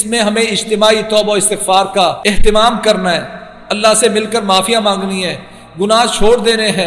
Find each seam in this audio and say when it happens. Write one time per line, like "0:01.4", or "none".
0:02.2